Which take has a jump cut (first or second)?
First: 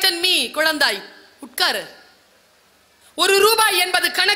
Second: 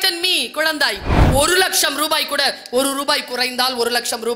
second